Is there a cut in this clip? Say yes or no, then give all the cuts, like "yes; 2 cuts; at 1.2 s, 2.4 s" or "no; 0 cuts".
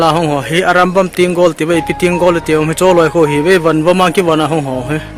no; 0 cuts